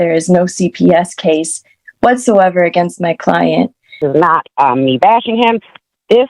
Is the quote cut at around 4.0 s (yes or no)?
yes